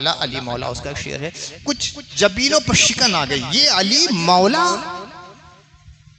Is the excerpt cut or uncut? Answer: uncut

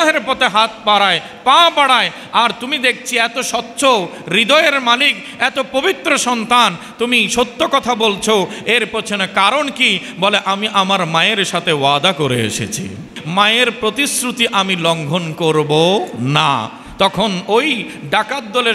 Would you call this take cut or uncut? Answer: cut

